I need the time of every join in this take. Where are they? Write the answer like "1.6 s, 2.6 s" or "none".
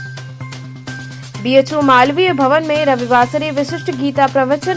none